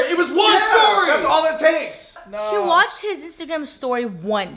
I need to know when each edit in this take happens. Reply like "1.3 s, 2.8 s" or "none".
2.1 s